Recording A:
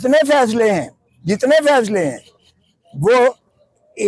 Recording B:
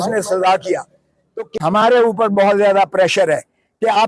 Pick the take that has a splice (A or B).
B